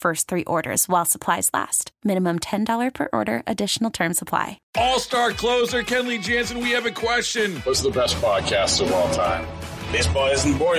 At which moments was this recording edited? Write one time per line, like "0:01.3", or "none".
0:04.6